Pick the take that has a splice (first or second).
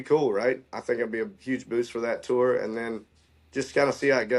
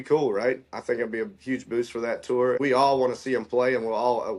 second